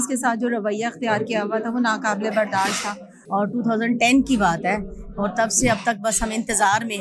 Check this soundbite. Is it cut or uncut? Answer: cut